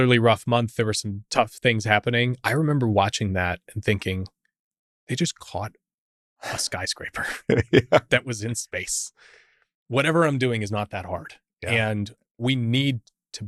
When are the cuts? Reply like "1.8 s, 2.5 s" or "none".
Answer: 12.2 s